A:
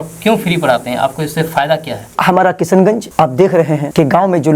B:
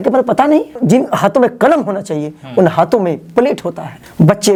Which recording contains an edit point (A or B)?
A